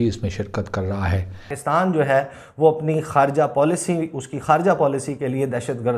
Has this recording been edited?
yes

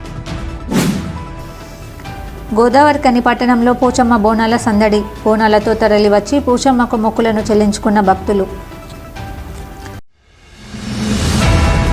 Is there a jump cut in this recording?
no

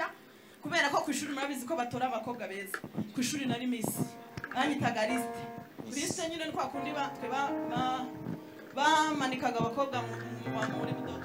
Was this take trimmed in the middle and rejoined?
no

